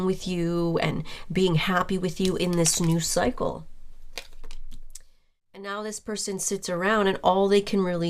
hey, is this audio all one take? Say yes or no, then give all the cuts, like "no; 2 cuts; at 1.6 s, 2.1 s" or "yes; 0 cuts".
no; 1 cut; at 5.6 s